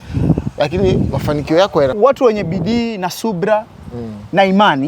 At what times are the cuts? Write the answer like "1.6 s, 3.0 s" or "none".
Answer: 1.9 s